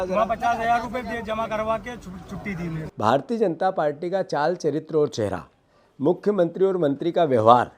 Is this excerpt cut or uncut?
cut